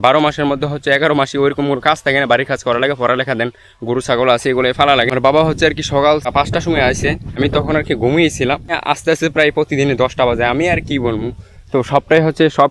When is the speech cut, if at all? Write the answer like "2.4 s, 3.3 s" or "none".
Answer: 5.2 s, 6.3 s, 7.4 s, 8.8 s